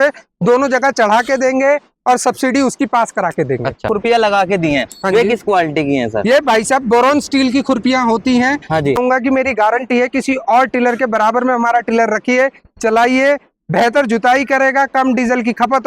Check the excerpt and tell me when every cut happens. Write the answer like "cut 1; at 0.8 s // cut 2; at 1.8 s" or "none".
cut 1; at 4.0 s // cut 2; at 8.7 s

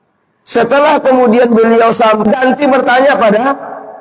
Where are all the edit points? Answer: cut 1; at 2.2 s

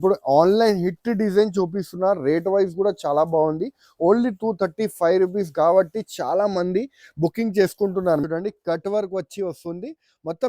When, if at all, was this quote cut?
cut 1; at 8.2 s

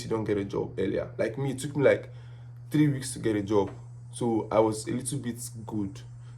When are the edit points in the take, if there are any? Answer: none

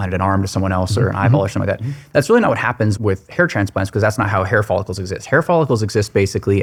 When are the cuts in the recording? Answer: none

